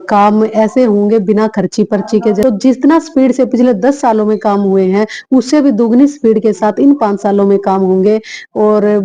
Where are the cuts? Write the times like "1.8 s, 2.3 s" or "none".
none